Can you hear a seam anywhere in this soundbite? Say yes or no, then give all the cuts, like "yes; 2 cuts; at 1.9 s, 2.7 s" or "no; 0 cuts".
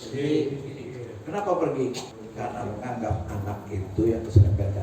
yes; 1 cut; at 2.2 s